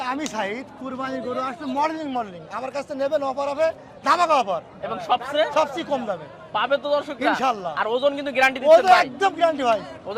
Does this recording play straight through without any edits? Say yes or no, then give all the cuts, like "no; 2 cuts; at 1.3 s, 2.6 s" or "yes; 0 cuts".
yes; 0 cuts